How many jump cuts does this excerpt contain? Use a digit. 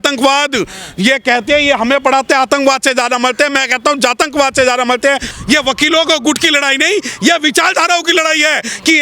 1